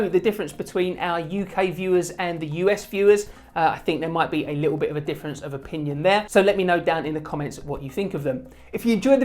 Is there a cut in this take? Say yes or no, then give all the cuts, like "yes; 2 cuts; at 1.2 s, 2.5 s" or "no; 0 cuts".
yes; 1 cut; at 6.3 s